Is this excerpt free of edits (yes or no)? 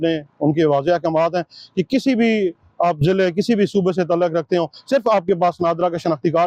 yes